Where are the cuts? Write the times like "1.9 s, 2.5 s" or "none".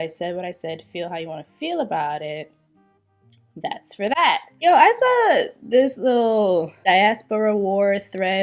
4.5 s, 6.7 s